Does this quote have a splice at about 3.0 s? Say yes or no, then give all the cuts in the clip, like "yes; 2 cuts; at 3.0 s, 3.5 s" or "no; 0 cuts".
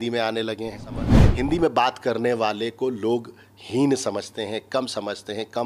no; 1 cut; at 1.2 s